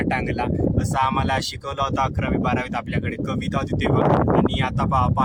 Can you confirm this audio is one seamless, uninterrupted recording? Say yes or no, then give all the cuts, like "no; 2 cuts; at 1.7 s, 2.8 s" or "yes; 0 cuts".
yes; 0 cuts